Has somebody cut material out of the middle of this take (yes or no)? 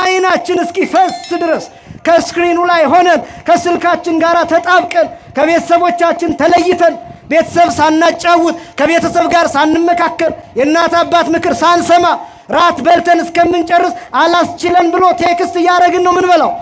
no